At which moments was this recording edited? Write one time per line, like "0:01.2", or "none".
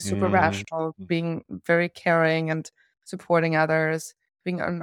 0:01.0